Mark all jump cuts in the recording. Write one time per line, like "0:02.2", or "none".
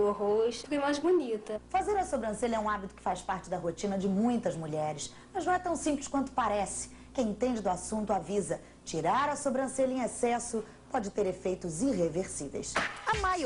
none